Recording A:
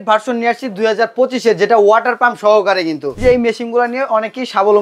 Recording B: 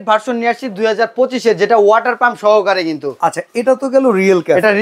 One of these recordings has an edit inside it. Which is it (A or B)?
A